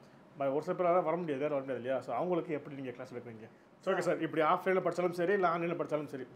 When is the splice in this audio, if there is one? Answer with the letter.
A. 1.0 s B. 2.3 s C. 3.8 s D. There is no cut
C